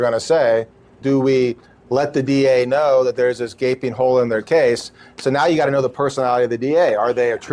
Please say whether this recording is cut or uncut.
cut